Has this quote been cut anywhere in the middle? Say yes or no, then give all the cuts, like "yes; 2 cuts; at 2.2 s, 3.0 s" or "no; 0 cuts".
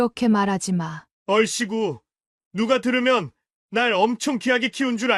no; 0 cuts